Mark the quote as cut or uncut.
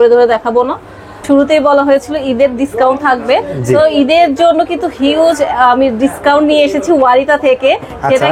cut